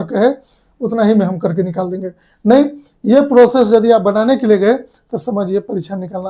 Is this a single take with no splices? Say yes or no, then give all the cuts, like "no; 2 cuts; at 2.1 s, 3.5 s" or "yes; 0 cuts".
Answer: yes; 0 cuts